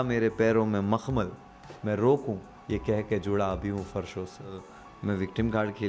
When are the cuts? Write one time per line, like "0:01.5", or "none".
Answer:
0:04.7